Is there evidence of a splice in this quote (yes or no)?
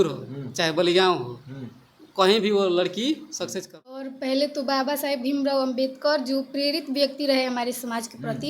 yes